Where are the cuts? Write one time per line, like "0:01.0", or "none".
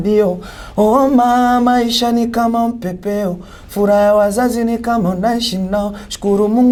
none